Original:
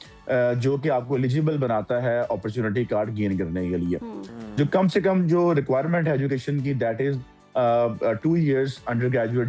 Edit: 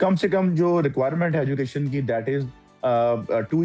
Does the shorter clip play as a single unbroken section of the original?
yes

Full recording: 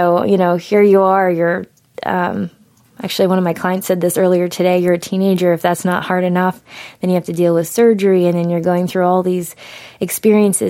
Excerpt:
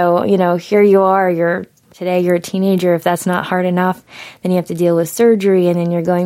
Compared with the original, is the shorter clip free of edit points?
no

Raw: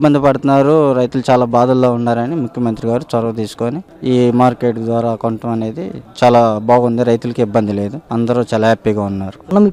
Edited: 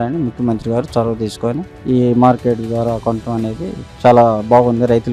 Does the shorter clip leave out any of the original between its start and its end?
no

